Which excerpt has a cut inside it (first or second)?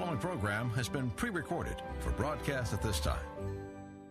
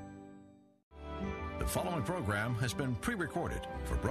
second